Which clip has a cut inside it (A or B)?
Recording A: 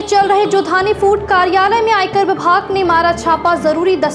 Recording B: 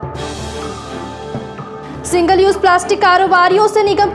B